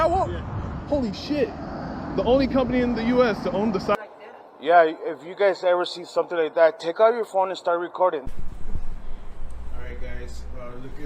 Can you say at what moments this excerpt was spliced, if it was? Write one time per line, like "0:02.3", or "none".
0:03.9